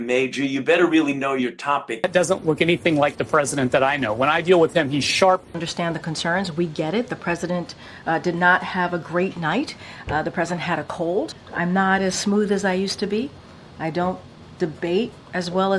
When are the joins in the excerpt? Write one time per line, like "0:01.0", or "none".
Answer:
0:02.0
0:05.6
0:09.9
0:11.4